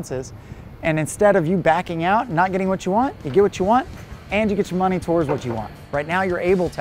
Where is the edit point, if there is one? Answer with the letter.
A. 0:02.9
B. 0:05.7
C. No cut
B